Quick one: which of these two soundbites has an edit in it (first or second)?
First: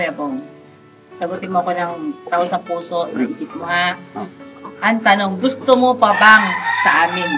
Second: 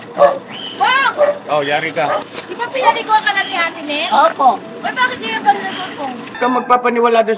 second